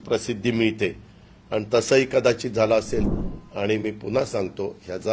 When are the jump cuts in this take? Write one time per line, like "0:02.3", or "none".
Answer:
0:03.1